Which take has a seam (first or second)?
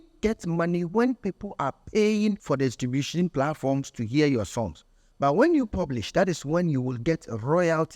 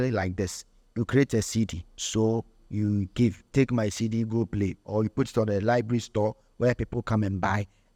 first